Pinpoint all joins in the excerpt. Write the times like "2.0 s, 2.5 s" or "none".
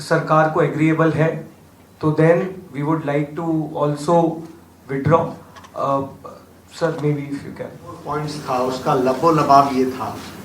8.0 s